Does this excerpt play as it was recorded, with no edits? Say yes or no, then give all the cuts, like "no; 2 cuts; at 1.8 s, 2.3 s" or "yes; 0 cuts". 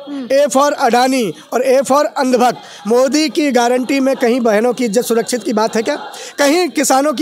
yes; 0 cuts